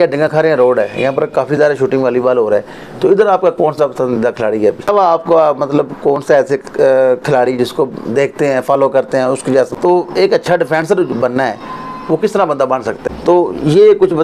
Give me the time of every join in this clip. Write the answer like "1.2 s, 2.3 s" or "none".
4.8 s, 9.7 s, 13.0 s